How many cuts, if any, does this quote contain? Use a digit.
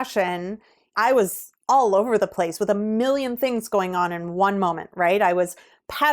1